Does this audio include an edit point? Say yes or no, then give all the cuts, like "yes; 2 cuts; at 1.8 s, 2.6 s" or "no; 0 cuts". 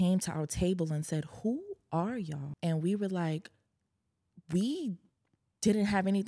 yes; 1 cut; at 2.4 s